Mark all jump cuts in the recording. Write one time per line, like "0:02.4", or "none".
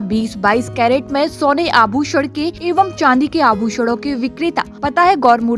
0:02.6
0:04.7